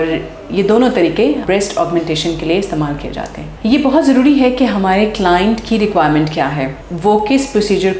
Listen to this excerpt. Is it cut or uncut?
cut